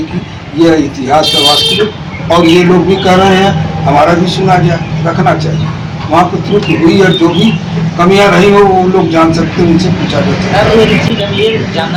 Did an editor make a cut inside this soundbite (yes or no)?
no